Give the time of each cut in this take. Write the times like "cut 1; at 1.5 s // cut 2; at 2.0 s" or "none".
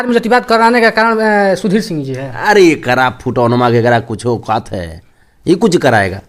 none